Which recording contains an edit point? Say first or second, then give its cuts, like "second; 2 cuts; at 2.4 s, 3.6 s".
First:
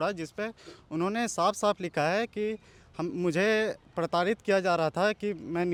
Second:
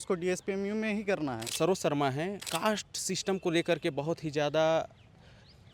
second; 2 cuts; at 1.4 s, 2.5 s